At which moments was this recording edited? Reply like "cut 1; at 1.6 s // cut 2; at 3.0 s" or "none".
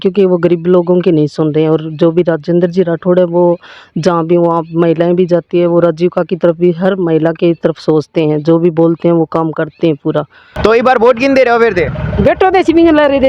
cut 1; at 10.4 s